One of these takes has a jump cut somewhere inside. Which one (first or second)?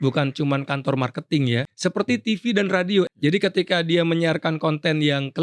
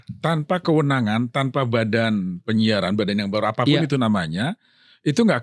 first